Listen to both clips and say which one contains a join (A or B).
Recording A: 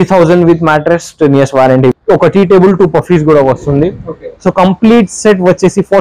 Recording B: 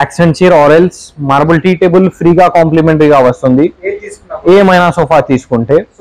A